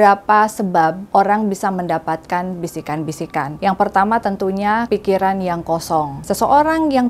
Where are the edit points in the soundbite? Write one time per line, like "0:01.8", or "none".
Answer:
0:01.0
0:03.5
0:04.9
0:06.2